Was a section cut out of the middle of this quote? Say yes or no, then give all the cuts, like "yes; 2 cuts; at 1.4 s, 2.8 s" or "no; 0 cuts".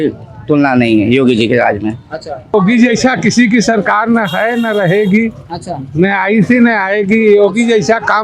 yes; 1 cut; at 2.5 s